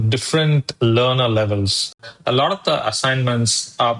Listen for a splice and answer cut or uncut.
cut